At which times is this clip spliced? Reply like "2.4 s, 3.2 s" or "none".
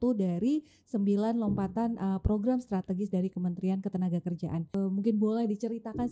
4.7 s

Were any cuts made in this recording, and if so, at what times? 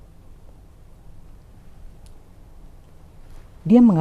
none

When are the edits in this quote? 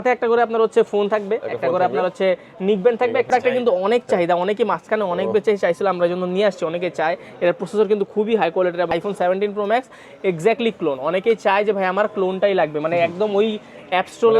3.3 s, 8.9 s

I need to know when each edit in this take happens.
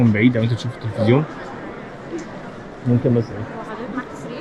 none

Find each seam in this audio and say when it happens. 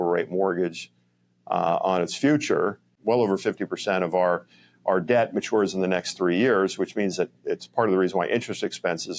2.9 s

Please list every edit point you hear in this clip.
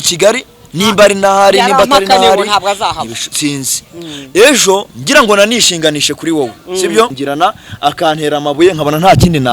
7.2 s

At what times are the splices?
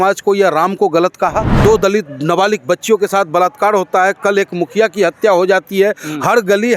1.5 s

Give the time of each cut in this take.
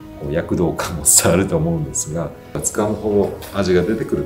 2.6 s

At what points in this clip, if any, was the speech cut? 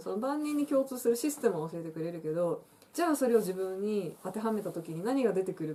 none

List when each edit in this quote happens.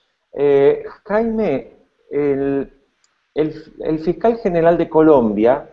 none

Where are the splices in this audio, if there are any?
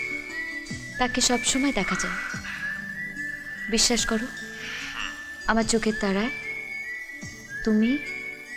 none

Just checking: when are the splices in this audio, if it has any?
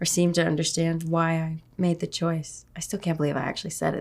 none

